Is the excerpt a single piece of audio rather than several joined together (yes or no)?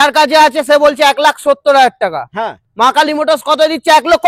yes